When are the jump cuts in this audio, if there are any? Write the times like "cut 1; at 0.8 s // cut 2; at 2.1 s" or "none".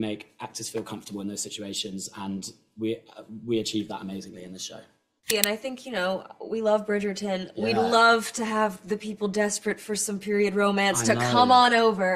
cut 1; at 5.3 s